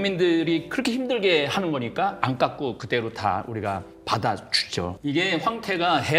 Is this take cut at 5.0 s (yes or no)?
yes